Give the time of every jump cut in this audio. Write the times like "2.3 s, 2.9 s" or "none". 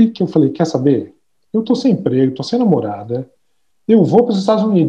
none